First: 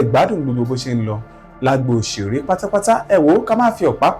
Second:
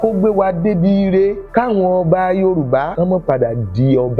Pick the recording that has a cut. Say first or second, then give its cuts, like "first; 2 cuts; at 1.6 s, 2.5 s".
second; 2 cuts; at 1.4 s, 2.9 s